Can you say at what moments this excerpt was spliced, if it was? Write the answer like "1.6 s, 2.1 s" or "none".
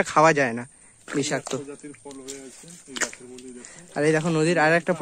none